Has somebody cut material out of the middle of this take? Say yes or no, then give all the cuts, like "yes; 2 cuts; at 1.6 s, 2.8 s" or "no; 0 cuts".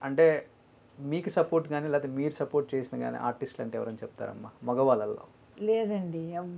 no; 0 cuts